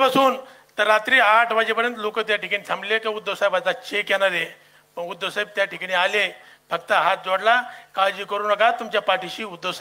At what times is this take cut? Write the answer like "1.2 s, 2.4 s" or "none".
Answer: none

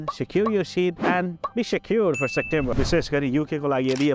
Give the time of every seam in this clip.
2.7 s

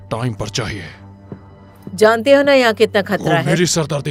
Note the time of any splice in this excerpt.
none

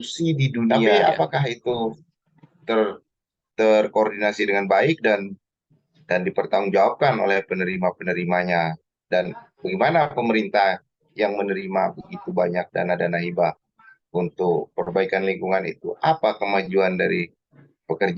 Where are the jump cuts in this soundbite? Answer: 0.9 s

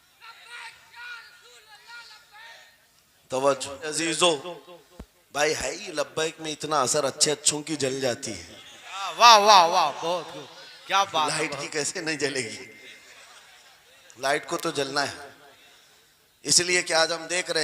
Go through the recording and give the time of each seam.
4.0 s

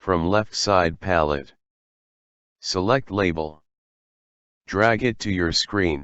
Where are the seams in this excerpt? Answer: 0.9 s

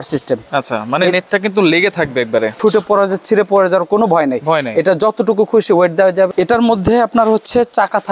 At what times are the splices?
2.6 s, 6.3 s

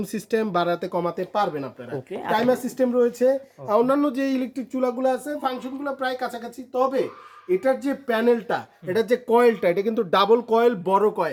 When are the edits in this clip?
none

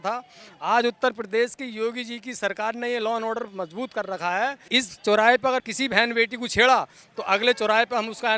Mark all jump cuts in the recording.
4.6 s, 5.7 s

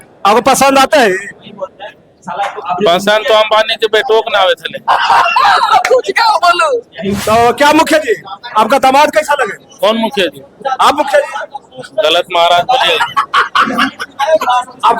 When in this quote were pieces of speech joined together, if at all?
7.2 s

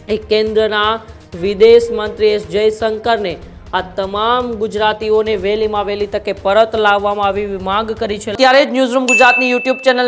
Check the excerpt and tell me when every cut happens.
8.3 s

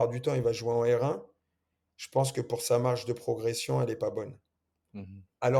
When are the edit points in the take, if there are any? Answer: none

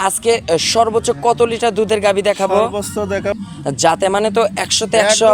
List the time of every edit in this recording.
3.4 s

